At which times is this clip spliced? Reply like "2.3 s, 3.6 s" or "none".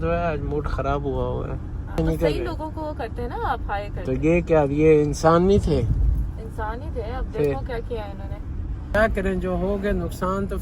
2.0 s, 8.9 s

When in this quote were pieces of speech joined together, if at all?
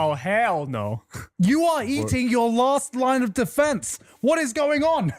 none

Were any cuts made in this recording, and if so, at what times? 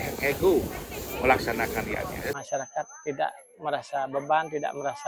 2.4 s

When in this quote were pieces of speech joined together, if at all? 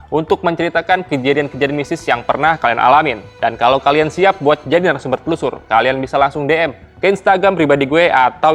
none

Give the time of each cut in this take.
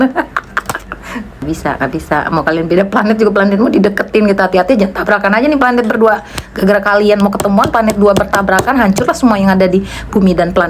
1.4 s

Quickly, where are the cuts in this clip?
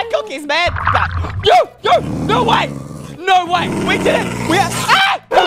4.4 s

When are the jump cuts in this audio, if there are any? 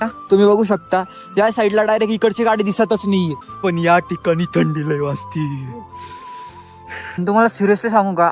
3.4 s, 7.2 s

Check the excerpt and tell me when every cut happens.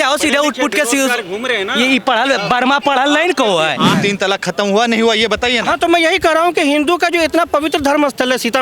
4.0 s

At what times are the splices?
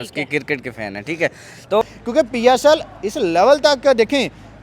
1.8 s

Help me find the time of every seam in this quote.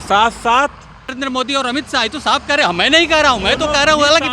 1.1 s

